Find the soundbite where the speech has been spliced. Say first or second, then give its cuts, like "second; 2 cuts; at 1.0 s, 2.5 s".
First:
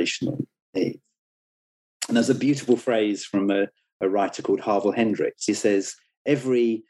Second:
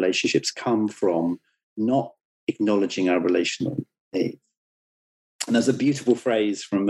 first; 1 cut; at 5.5 s